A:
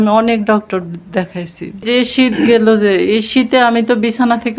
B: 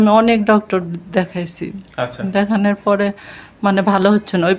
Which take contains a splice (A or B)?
A